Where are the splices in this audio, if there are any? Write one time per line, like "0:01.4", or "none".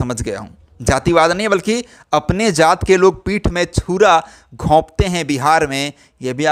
none

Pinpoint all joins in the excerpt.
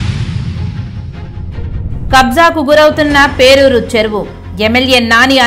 0:02.0

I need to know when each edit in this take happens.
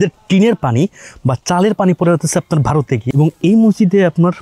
0:03.0

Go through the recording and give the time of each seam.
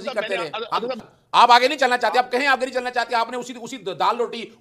0:01.1

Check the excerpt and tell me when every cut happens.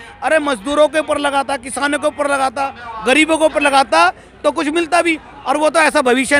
none

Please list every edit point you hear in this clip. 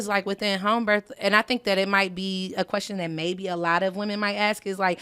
none

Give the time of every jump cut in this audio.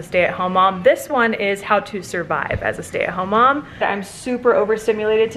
0:03.8

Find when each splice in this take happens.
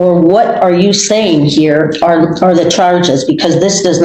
none

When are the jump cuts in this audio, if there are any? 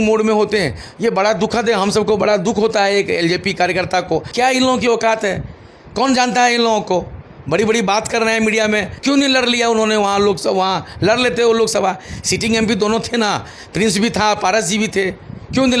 0:04.3
0:08.9

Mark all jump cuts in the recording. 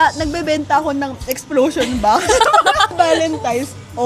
0:02.9

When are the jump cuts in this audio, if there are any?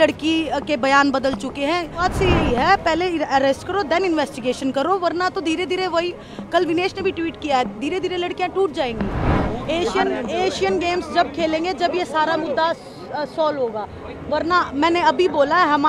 0:02.0
0:09.3

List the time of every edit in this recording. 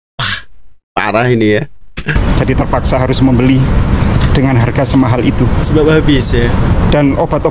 none

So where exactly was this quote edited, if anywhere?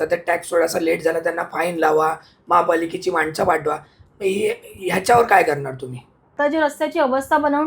0:06.3

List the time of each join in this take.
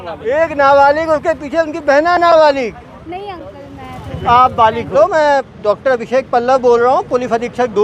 0:04.9

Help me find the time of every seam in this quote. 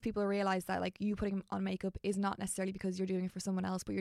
none

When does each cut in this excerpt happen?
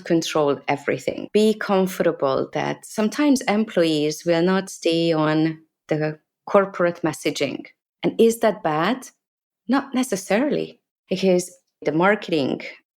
0:11.8

